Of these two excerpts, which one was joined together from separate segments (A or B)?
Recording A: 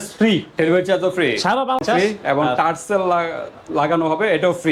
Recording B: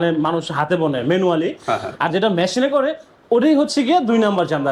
A